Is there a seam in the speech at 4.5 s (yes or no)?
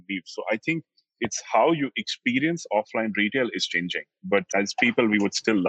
yes